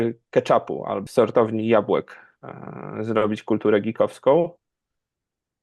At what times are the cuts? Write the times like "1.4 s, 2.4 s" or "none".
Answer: 1.0 s